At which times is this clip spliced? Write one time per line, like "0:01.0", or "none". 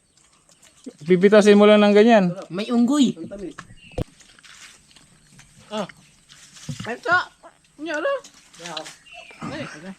0:04.0